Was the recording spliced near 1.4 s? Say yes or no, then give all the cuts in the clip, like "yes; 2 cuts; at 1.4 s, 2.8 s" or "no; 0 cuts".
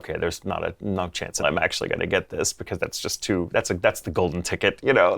yes; 1 cut; at 1.4 s